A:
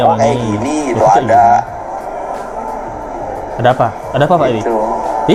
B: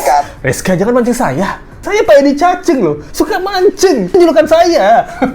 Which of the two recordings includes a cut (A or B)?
B